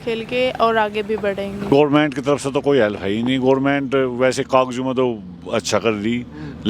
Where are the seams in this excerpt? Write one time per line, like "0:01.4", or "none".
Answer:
0:01.7